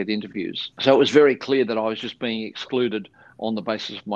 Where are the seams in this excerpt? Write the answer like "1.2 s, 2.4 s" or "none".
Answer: none